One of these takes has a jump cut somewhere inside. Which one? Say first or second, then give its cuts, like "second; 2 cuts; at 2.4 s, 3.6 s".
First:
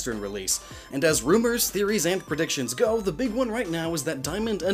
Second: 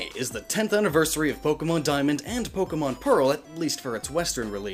first; 1 cut; at 2.9 s